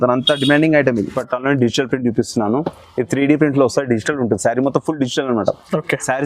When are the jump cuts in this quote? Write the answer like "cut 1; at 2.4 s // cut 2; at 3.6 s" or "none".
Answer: cut 1; at 1.2 s

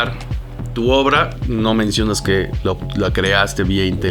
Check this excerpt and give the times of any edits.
none

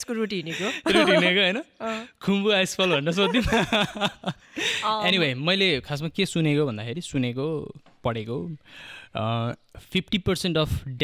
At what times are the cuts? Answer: none

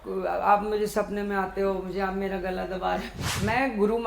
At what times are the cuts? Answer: cut 1; at 3.2 s

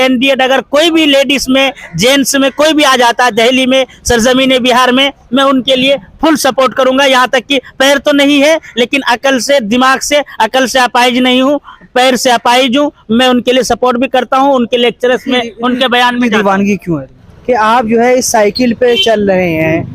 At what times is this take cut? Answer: cut 1; at 17.3 s

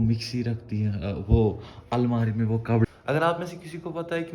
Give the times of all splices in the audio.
cut 1; at 2.9 s

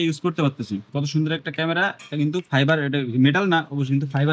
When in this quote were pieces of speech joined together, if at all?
cut 1; at 0.9 s

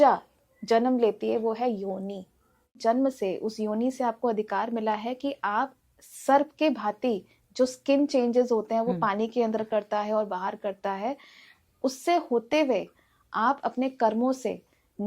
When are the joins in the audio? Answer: cut 1; at 2.8 s

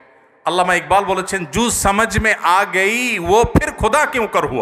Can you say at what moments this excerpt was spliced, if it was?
none

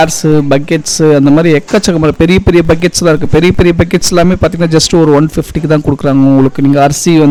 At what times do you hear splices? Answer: none

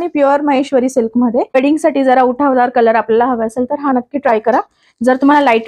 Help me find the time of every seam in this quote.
cut 1; at 1.5 s

